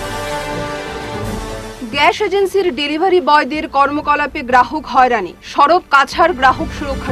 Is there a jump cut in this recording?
no; 0 cuts

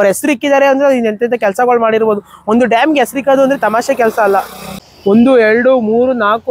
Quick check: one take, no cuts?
no; 1 cut; at 4.6 s

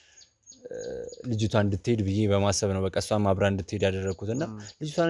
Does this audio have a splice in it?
no; 0 cuts

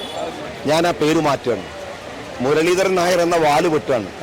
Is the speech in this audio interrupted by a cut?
no; 0 cuts

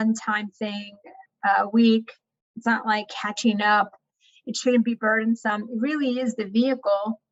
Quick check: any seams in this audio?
no; 0 cuts

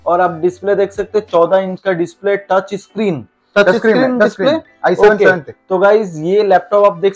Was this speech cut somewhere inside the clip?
no; 0 cuts

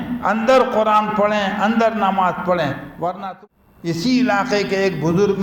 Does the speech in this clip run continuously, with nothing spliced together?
no; 1 cut; at 3.2 s

